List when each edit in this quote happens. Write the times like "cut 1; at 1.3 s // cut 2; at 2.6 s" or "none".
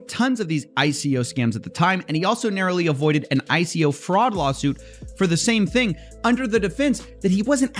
none